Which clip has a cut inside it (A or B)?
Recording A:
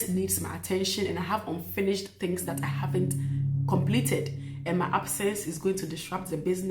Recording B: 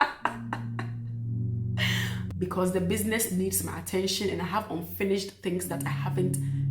B